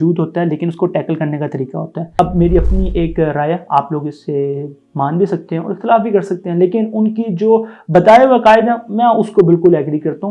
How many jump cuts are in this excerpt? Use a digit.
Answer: 1